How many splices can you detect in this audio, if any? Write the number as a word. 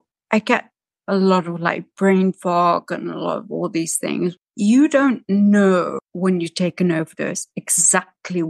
two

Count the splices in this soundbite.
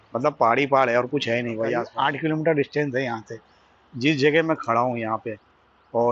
one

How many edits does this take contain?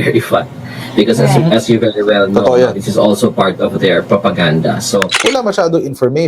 one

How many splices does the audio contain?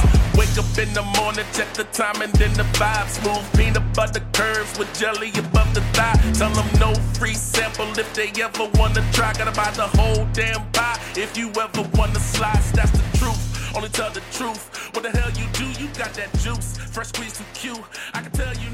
zero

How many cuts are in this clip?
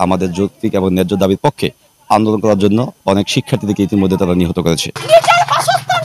one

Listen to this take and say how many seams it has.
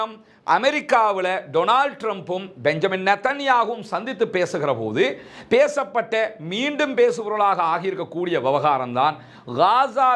zero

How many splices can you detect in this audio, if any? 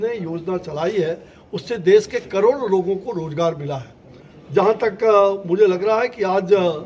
zero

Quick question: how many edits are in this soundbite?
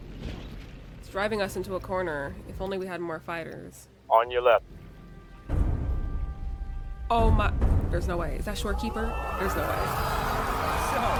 zero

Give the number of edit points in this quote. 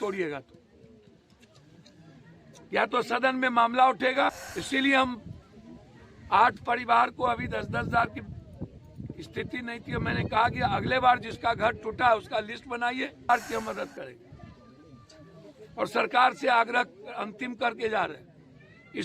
two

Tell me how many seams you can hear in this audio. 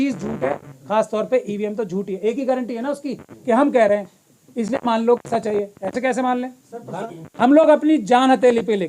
one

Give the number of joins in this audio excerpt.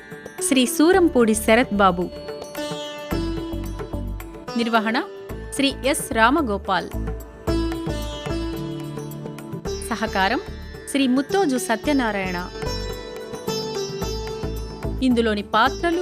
six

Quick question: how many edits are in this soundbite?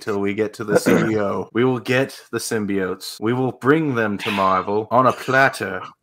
three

